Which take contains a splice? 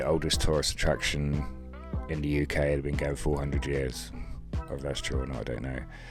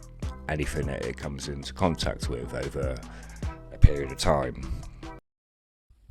second; 1 cut; at 5.2 s

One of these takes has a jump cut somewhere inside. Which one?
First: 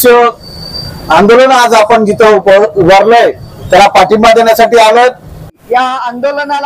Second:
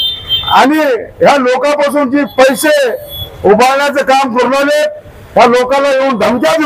first; 1 cut; at 5.4 s

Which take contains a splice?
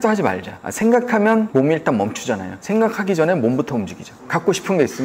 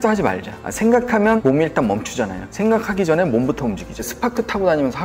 second; 2 cuts; at 1.4 s, 4.1 s

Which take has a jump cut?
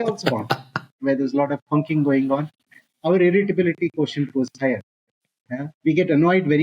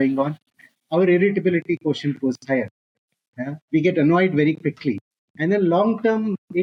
first; 1 cut; at 1.0 s

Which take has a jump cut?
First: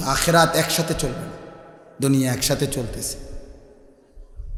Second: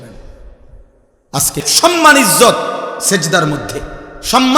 second; 1 cut; at 1.6 s

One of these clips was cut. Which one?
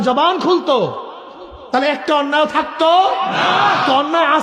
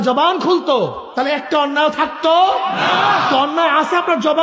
second; 1 cut; at 1.0 s

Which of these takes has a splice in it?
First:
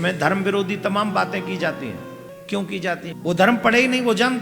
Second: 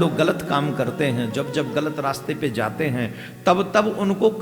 first; 2 cuts; at 2.3 s, 3.2 s

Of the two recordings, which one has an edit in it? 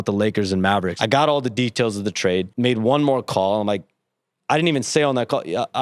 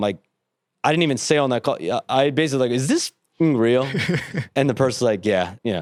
first; 2 cuts; at 0.9 s, 2.5 s

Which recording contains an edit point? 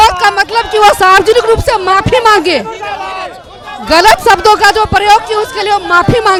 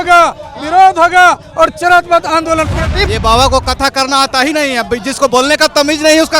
second; 1 cut; at 3.0 s

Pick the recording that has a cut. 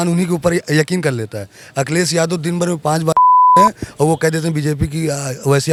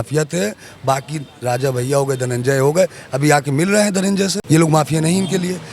second; 1 cut; at 4.4 s

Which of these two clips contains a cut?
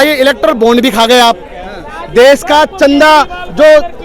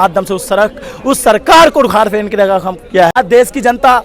second; 1 cut; at 3.1 s

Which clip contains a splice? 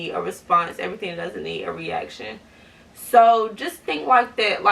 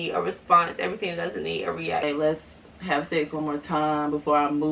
second; 1 cut; at 2.0 s

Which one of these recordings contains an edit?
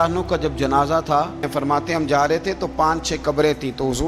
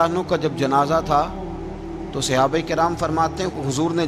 first; 1 cut; at 1.5 s

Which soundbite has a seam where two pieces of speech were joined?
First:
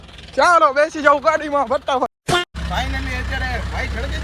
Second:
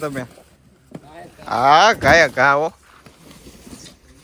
first; 1 cut; at 2.5 s

